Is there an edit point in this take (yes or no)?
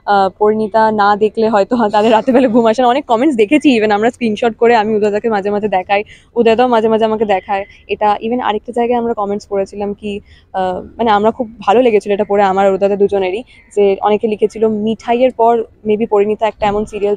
no